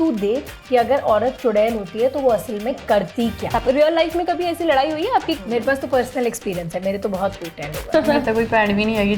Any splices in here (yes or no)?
yes